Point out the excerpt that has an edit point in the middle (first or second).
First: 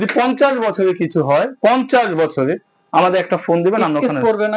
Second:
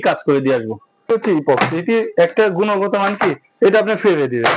second